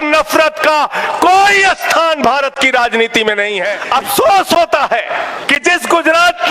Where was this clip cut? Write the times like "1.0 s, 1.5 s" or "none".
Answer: 3.8 s, 5.4 s